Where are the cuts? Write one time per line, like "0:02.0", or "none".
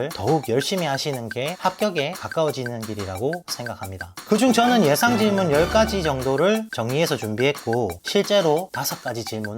0:03.7
0:08.0